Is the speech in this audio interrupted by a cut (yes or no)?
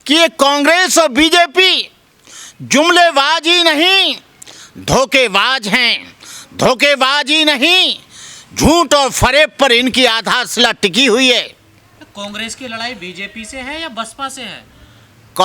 no